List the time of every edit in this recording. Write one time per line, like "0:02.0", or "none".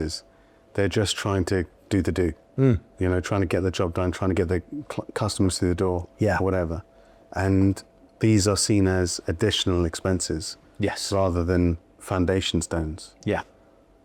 none